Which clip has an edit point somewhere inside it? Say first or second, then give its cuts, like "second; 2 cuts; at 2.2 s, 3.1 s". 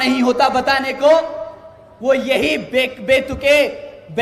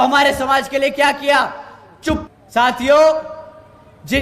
second; 1 cut; at 2.3 s